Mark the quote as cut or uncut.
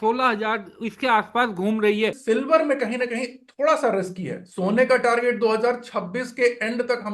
cut